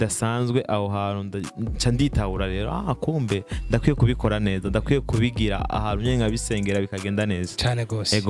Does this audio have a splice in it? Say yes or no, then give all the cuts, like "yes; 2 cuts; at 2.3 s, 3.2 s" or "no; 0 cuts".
no; 0 cuts